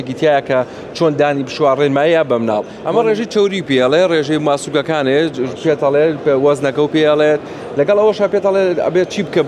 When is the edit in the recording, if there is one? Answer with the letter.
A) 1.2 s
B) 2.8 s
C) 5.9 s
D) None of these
B